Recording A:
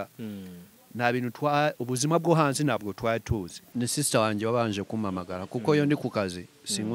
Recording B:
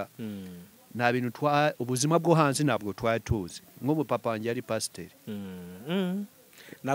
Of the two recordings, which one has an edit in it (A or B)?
A